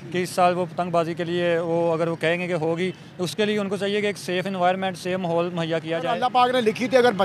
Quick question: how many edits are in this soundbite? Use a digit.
1